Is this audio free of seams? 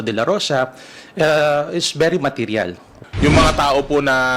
no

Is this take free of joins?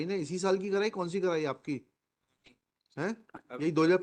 yes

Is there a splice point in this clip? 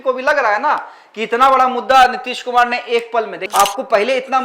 yes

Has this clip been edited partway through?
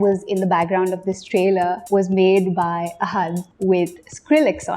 yes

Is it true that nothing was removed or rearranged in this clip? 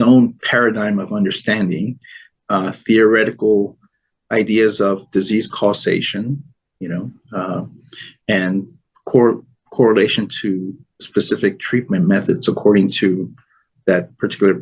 yes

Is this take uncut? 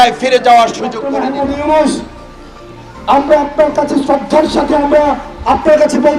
no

